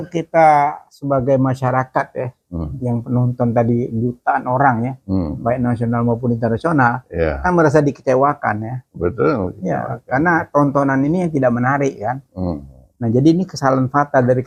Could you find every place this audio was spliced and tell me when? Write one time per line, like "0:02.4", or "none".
none